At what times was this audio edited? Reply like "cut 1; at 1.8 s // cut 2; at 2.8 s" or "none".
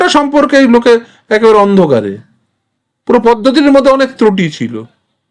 none